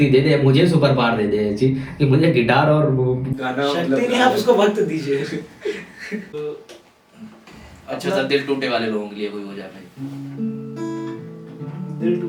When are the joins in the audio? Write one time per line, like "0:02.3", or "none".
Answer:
0:06.2

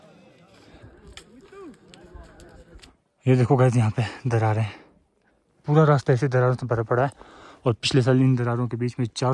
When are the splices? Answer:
0:02.9

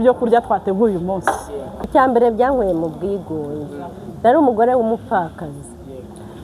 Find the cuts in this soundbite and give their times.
0:01.9

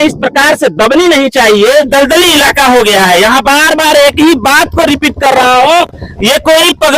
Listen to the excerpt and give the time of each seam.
0:01.9
0:03.4

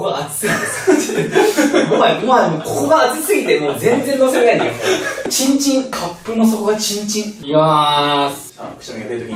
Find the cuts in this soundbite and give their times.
0:01.1

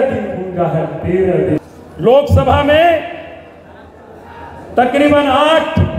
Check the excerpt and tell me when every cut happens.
0:01.6

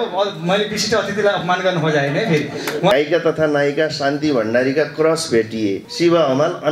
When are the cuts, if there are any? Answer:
0:02.9
0:05.9

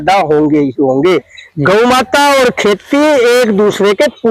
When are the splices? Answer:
0:01.4

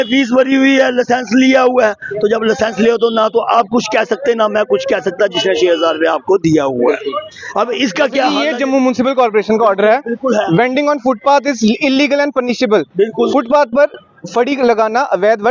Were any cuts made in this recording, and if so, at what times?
0:08.4

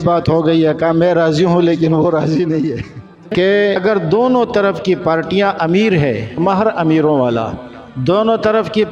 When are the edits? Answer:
0:03.3

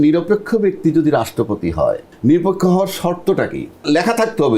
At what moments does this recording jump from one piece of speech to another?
0:02.1
0:03.8

